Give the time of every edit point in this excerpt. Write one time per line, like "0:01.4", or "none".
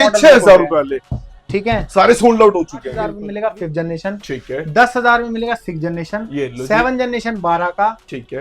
0:03.2